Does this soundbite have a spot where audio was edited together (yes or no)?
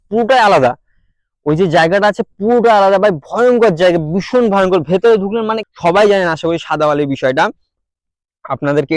yes